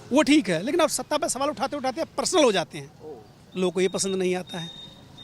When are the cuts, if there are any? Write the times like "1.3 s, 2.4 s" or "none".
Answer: none